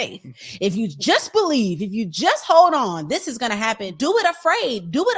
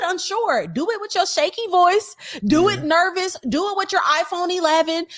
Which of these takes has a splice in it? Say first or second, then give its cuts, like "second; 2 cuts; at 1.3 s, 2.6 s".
first; 1 cut; at 3.9 s